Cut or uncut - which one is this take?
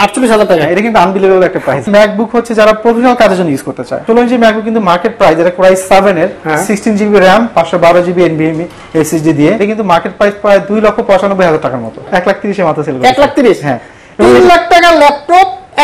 cut